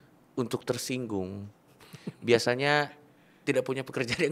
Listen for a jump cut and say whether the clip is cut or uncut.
uncut